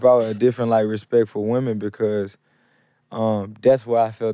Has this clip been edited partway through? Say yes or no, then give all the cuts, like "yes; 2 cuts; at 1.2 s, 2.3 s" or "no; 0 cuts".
no; 0 cuts